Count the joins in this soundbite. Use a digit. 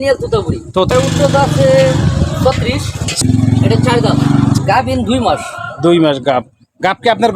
3